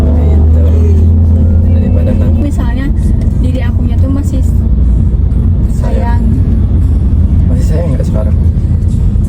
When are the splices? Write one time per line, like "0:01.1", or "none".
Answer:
0:02.4